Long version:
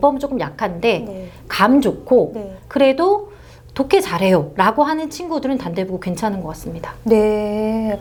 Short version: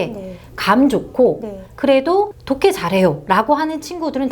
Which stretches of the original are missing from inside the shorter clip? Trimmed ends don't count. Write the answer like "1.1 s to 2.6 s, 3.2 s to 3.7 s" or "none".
3.3 s to 3.7 s